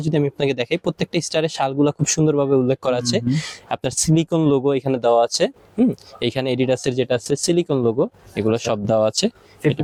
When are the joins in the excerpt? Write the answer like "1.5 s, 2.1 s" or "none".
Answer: none